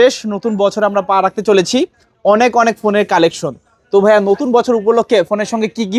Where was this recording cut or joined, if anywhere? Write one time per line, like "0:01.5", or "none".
none